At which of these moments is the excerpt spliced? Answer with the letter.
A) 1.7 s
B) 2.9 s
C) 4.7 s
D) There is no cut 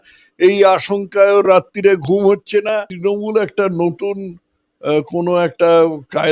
B